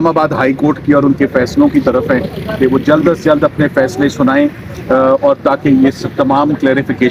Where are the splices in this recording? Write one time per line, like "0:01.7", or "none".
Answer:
none